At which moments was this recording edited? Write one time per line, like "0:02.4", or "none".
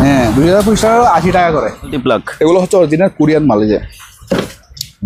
0:02.0

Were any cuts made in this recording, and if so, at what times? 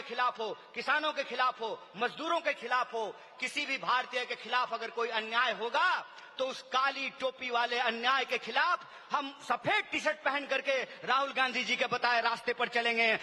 none

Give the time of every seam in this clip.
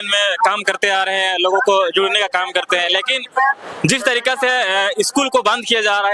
none

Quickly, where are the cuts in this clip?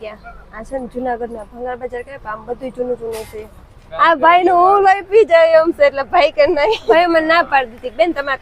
0:03.8
0:06.9

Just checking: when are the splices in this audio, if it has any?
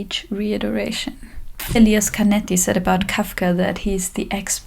0:01.8

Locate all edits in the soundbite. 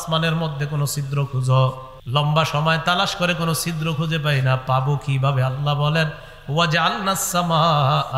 0:01.9

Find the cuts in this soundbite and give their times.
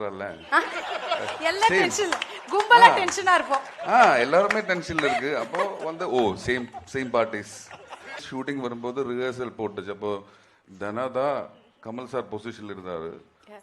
0:08.2

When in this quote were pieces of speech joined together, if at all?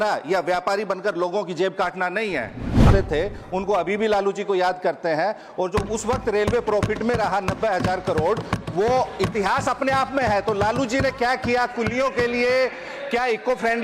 0:02.9

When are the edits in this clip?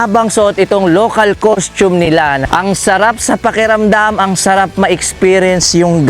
0:02.5

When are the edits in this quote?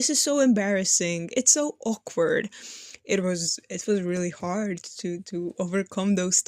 none

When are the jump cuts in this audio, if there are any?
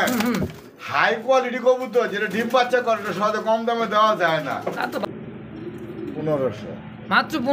0:05.0

